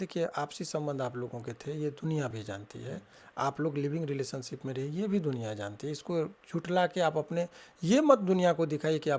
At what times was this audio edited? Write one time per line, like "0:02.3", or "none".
none